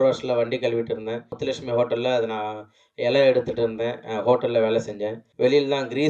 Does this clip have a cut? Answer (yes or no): yes